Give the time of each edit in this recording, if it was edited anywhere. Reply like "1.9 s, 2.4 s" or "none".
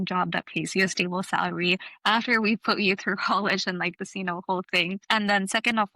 5.0 s

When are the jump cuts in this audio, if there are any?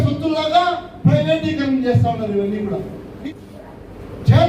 3.1 s

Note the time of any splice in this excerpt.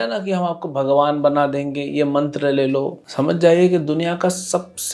3.0 s

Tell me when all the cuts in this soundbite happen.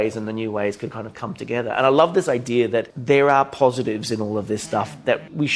2.9 s

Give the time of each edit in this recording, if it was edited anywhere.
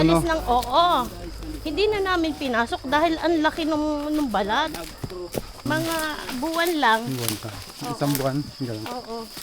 5.7 s

